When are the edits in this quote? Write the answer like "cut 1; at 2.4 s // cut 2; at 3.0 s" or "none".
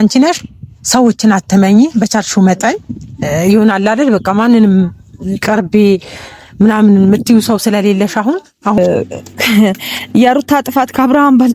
cut 1; at 8.8 s